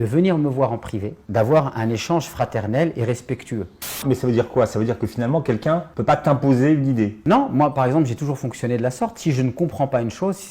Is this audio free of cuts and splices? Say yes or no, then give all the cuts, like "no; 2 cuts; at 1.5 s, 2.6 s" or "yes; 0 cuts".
no; 3 cuts; at 3.9 s, 5.9 s, 7.2 s